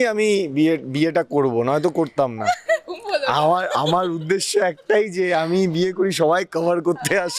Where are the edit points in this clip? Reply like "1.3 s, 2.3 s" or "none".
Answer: none